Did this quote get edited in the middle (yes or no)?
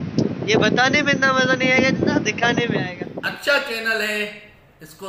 yes